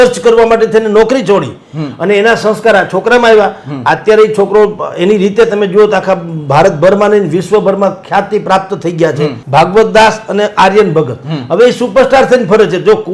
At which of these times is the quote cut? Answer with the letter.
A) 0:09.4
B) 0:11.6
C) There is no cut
A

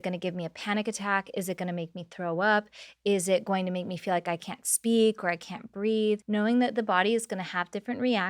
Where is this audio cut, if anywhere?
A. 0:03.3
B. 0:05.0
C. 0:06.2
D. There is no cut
C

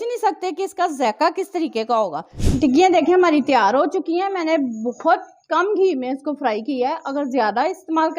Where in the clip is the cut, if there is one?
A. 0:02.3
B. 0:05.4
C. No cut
A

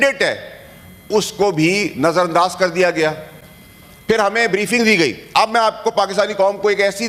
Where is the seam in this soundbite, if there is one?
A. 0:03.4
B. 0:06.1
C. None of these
C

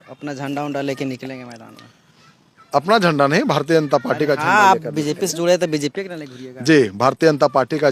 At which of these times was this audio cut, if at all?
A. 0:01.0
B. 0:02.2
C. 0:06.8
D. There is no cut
D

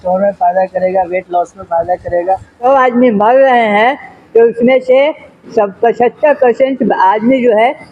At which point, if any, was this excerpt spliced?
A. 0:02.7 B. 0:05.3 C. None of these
A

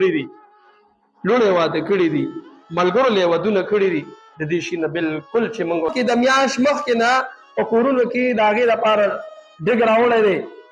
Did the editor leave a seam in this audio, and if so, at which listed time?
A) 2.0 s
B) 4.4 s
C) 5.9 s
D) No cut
C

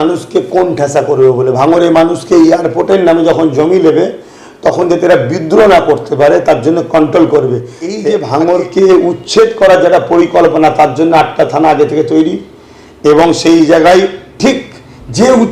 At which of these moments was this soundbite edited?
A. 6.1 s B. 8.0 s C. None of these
B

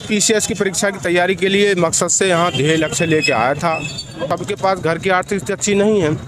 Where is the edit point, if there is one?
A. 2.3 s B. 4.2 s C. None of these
B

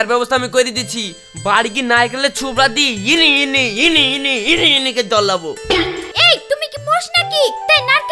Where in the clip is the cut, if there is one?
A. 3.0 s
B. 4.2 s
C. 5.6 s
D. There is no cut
D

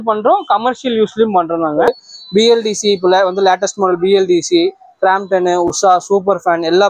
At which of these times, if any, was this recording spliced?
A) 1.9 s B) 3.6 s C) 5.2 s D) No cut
A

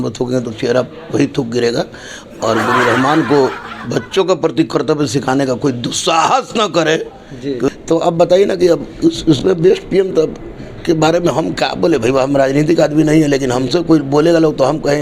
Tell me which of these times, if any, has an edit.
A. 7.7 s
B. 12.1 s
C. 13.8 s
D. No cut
A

